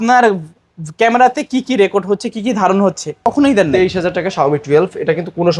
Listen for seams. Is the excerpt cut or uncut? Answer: cut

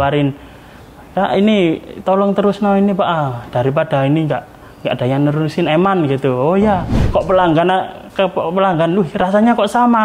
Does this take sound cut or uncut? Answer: cut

